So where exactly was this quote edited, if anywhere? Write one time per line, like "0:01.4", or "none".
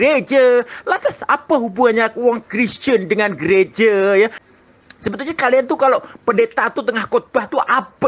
0:04.4